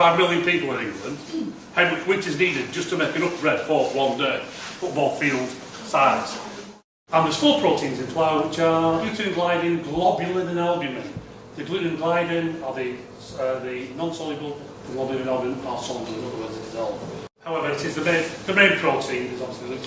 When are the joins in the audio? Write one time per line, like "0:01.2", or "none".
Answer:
0:04.5